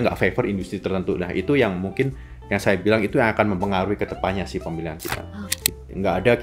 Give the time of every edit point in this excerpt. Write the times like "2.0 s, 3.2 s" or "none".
5.5 s